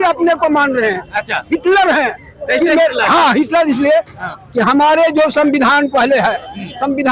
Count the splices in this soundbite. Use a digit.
0